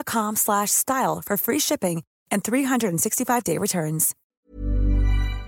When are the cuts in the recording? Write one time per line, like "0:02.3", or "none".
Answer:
0:04.2